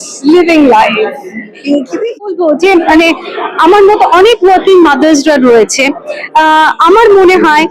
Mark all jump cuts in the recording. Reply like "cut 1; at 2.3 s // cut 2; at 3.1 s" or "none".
cut 1; at 2.1 s